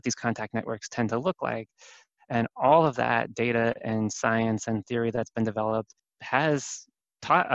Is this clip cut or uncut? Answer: uncut